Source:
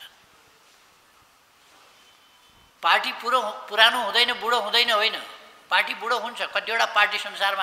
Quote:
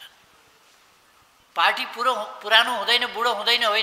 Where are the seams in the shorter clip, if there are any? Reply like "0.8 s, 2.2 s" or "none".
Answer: 1.4 s